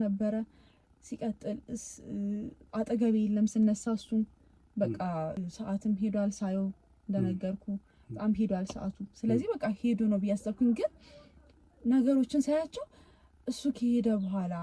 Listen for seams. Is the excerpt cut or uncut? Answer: cut